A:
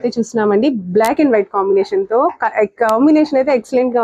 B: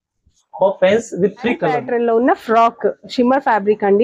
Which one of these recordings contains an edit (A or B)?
B